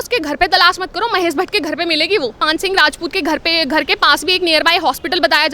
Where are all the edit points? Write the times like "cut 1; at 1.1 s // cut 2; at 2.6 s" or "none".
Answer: cut 1; at 2.4 s